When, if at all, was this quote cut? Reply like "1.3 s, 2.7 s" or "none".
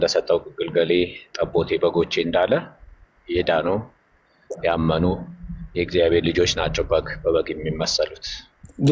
none